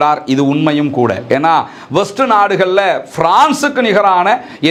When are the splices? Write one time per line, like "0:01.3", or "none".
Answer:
none